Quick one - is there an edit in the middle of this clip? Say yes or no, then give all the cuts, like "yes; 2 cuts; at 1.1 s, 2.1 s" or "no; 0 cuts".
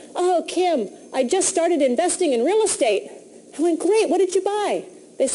no; 0 cuts